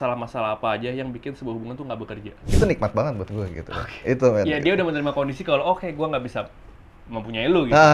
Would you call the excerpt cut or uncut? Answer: cut